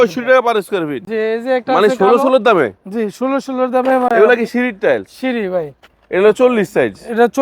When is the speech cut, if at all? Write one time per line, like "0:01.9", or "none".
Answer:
none